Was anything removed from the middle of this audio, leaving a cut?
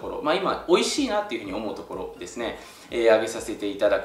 no; 0 cuts

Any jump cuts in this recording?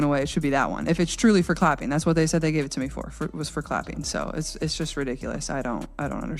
yes; 1 cut; at 4.3 s

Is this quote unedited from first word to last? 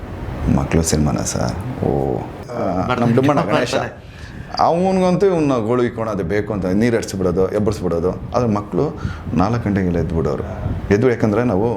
no; 1 cut; at 2.4 s

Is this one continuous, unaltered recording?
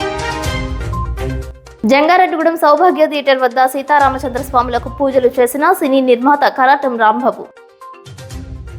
no; 1 cut; at 1.6 s

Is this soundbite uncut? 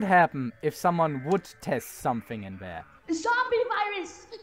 no; 1 cut; at 2.9 s

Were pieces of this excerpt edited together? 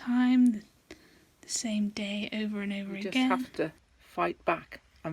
yes; 1 cut; at 3.5 s

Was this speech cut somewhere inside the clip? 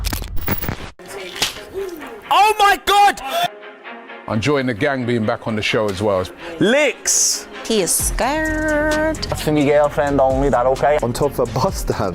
yes; 1 cut; at 1.0 s

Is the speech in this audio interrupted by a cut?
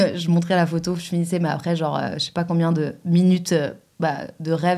no; 0 cuts

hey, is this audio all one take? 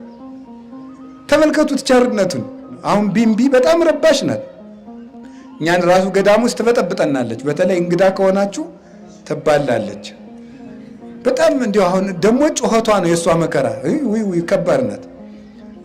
no; 1 cut; at 2.7 s

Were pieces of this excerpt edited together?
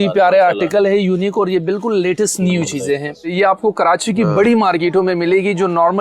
yes; 1 cut; at 3.3 s

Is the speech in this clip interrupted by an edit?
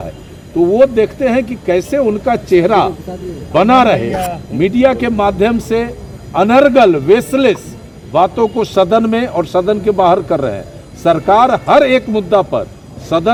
no; 0 cuts

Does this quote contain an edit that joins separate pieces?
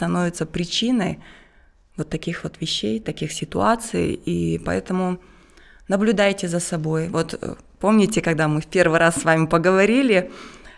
no; 0 cuts

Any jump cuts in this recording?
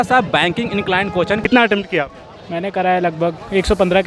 yes; 1 cut; at 1.4 s

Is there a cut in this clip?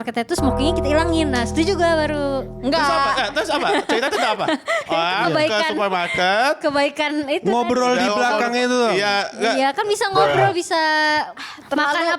no; 0 cuts

